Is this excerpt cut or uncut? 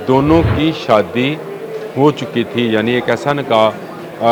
uncut